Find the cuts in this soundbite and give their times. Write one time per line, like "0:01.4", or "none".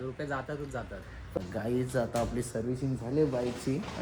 0:01.3